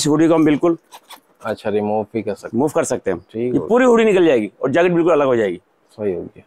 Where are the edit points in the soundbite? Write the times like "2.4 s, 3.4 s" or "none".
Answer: none